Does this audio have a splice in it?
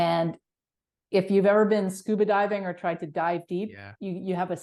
no; 0 cuts

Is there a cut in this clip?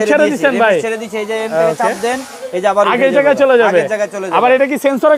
no; 0 cuts

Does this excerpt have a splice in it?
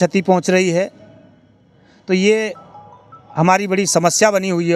no; 0 cuts

